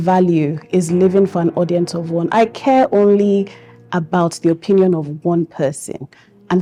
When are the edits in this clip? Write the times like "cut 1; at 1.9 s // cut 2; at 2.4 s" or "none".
none

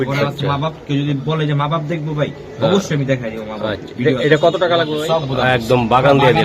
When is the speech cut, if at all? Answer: cut 1; at 5.0 s

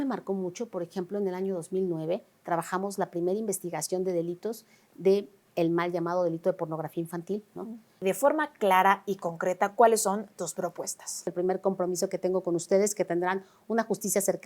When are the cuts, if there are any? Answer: cut 1; at 7.9 s // cut 2; at 11.3 s

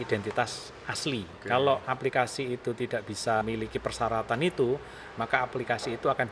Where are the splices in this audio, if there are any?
cut 1; at 1.4 s // cut 2; at 3.4 s

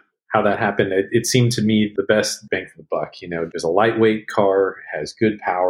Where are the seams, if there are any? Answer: cut 1; at 3.5 s

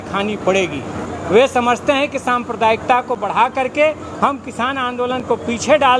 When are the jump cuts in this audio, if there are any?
cut 1; at 1.0 s

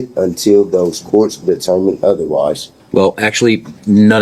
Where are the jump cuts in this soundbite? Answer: cut 1; at 2.7 s

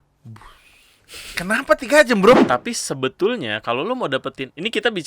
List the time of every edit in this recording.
cut 1; at 2.4 s

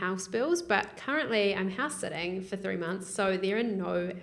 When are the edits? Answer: none

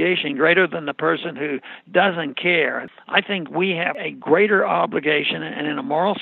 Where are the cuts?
cut 1; at 2.8 s // cut 2; at 3.9 s

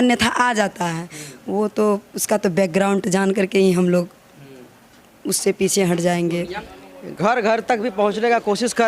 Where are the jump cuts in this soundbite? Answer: cut 1; at 6.6 s

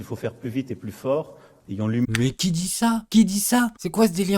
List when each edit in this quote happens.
cut 1; at 1.4 s

